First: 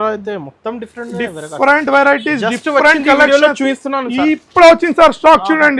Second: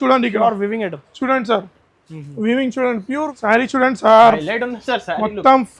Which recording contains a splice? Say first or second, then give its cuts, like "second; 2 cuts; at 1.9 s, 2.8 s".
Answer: second; 1 cut; at 3.3 s